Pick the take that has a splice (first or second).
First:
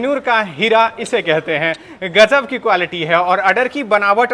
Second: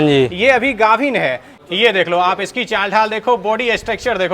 second